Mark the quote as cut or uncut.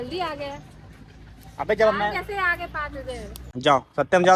cut